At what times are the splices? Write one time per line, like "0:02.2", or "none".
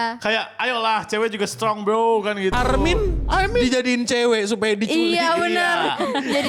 none